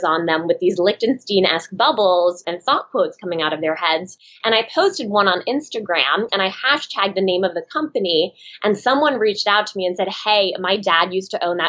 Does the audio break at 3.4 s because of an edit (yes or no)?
no